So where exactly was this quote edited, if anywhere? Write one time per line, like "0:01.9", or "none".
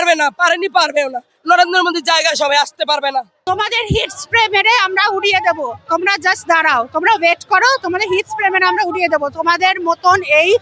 0:03.4